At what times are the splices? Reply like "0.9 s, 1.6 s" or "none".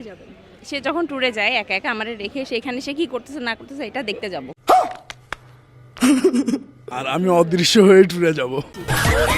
4.5 s